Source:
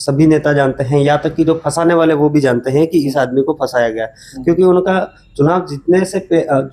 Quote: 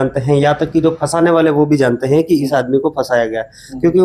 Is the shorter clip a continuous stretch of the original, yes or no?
yes